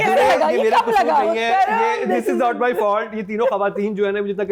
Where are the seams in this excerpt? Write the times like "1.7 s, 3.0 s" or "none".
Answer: none